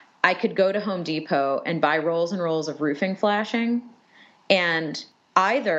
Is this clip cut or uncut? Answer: uncut